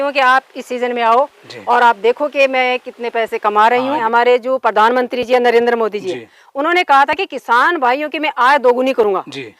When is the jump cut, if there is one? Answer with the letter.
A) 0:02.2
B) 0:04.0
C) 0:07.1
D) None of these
B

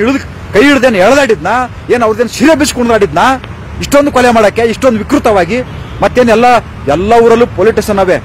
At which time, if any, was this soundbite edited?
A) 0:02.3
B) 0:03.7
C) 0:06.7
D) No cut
D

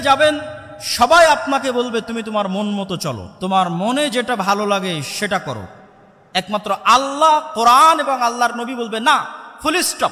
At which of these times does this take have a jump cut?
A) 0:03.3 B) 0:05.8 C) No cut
A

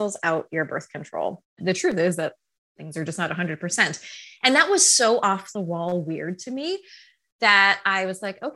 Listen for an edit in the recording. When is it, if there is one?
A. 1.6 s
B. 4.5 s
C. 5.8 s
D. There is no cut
A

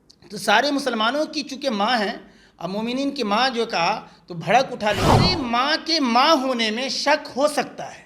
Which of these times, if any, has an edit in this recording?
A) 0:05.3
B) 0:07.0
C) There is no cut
A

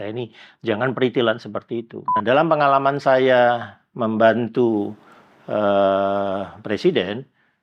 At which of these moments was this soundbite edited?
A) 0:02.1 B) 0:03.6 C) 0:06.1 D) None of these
A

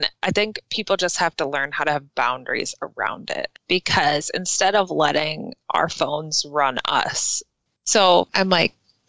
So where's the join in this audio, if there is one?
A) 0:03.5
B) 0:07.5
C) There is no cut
B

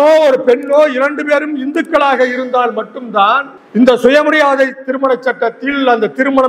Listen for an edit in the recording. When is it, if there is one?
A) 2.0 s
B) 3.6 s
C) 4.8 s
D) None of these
B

